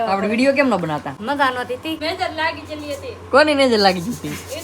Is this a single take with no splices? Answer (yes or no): no